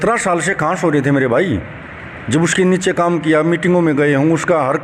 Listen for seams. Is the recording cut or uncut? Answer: uncut